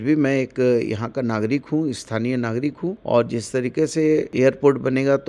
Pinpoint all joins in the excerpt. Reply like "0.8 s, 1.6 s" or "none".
3.0 s, 4.3 s